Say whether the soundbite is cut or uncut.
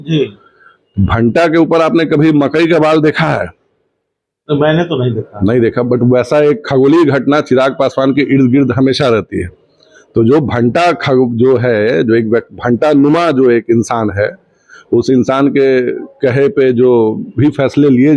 uncut